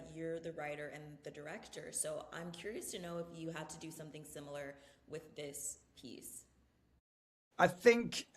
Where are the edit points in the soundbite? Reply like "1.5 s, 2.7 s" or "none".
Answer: none